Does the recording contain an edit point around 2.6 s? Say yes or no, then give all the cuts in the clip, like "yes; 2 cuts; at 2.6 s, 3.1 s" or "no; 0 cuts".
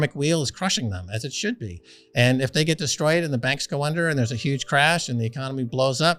no; 0 cuts